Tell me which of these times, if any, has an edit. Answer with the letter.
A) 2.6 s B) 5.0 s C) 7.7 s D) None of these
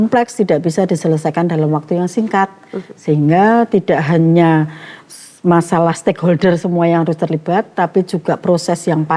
D